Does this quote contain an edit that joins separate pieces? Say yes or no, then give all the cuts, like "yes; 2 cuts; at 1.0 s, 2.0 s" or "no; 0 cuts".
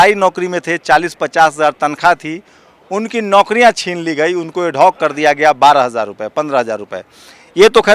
no; 0 cuts